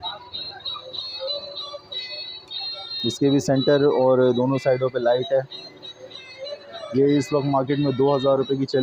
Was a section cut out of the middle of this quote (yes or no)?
no